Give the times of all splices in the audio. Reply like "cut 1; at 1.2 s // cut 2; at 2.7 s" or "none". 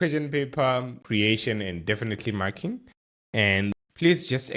cut 1; at 1.0 s // cut 2; at 3.7 s